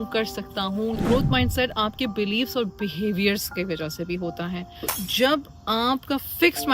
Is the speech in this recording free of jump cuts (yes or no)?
no